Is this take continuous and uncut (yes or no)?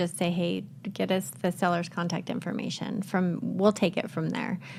yes